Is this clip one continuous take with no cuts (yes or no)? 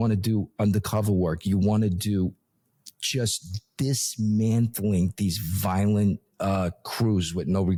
yes